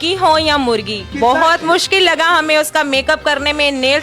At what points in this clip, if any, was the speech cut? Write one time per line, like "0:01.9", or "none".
0:01.0